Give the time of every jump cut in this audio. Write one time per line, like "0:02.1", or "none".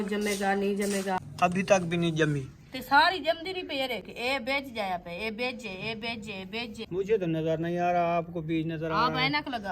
0:01.3
0:06.8